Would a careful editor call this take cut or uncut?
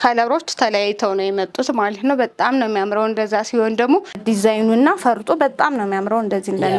cut